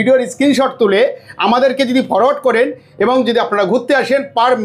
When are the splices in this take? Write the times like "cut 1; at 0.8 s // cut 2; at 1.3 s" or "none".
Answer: none